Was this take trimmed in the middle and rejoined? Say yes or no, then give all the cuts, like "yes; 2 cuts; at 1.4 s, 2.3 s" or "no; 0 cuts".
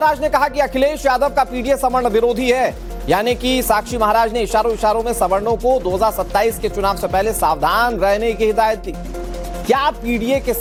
no; 0 cuts